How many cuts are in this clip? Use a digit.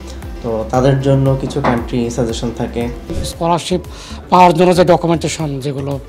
1